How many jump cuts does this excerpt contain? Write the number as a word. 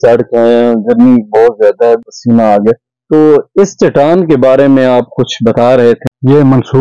three